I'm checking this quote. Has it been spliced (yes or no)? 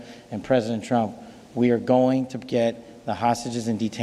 no